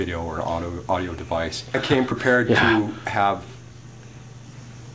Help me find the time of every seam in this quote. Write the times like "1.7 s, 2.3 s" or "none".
1.8 s